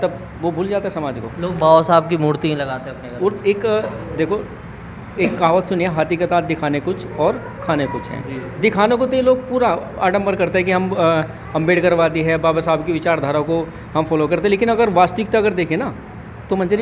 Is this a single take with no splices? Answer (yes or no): yes